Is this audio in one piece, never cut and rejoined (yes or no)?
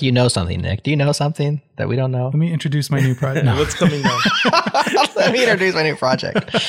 yes